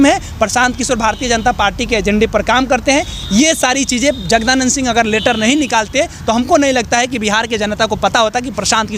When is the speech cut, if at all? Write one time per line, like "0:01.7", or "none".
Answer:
none